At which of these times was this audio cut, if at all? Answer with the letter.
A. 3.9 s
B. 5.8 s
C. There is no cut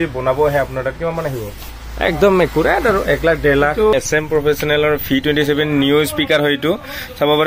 A